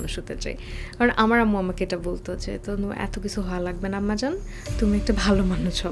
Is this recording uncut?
yes; 0 cuts

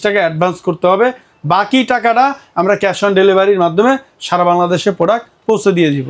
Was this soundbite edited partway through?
no; 0 cuts

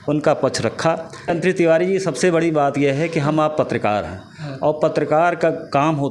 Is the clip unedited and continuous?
no; 1 cut; at 1.3 s

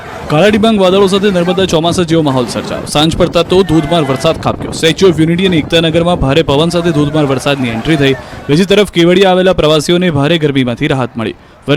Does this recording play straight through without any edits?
no; 1 cut; at 4.4 s

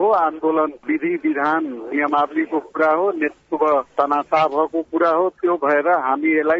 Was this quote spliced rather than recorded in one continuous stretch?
no; 0 cuts

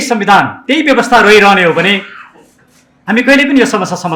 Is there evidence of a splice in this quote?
no; 0 cuts

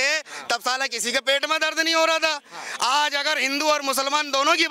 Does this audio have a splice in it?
no; 0 cuts

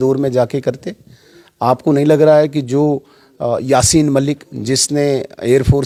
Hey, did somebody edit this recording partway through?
no; 0 cuts

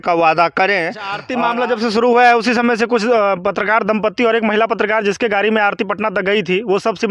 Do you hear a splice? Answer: yes; 1 cut; at 1.2 s

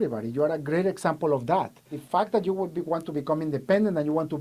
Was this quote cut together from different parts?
yes; 1 cut; at 1.9 s

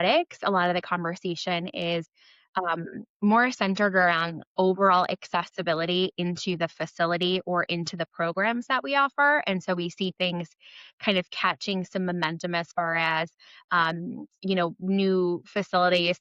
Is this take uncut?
yes; 0 cuts

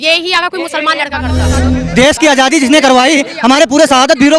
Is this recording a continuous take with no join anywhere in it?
no; 1 cut; at 1.6 s

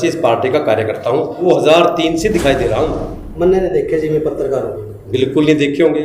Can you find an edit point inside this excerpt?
yes; 1 cut; at 1.4 s

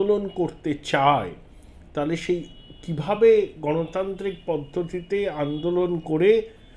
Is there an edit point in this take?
no; 0 cuts

